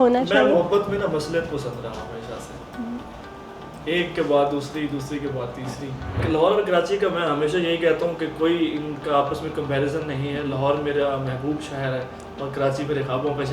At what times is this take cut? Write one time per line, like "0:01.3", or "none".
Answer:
0:06.2